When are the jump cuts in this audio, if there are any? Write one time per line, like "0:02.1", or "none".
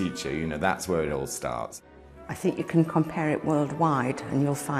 0:01.8